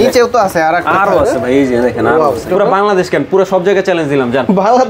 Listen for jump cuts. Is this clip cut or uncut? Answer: cut